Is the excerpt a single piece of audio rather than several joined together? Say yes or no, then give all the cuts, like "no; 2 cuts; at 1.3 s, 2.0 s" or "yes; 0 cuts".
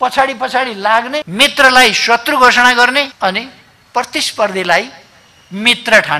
no; 2 cuts; at 1.3 s, 3.1 s